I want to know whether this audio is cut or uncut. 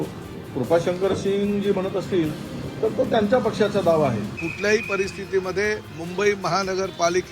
cut